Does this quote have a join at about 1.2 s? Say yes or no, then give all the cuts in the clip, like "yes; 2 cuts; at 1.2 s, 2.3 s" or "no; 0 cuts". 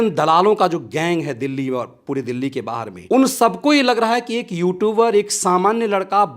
no; 1 cut; at 2.9 s